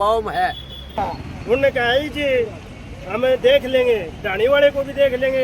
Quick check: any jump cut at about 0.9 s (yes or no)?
yes